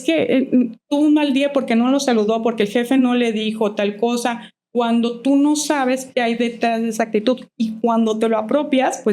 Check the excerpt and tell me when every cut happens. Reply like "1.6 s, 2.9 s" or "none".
none